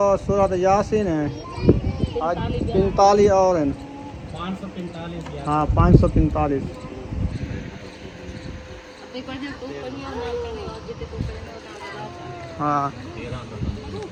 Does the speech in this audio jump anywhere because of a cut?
no; 0 cuts

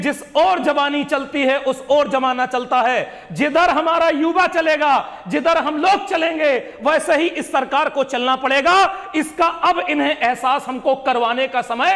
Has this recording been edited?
no; 0 cuts

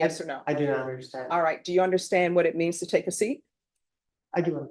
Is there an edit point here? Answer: no; 0 cuts

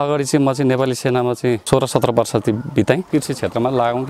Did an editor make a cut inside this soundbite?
yes; 2 cuts; at 1.6 s, 3.1 s

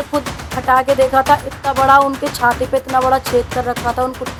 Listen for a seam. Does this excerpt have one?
no; 0 cuts

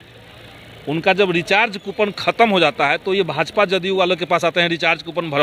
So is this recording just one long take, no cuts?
yes; 0 cuts

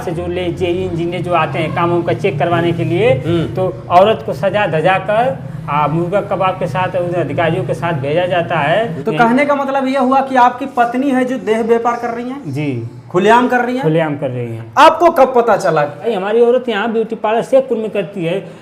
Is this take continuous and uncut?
no; 2 cuts; at 9.0 s, 16.1 s

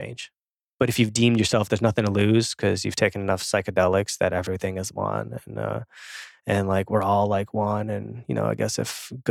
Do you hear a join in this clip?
no; 0 cuts

